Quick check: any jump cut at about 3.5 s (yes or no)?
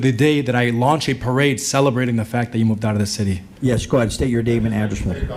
yes